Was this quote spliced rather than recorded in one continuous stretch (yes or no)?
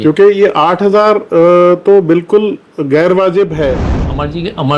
yes